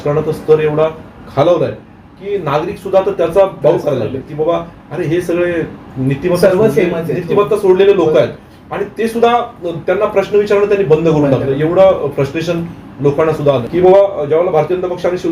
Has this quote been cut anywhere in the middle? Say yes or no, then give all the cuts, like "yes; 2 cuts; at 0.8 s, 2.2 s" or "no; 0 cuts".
yes; 1 cut; at 13.6 s